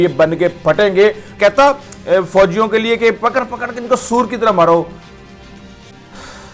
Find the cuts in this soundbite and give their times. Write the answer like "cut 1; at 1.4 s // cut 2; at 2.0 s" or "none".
cut 1; at 1.3 s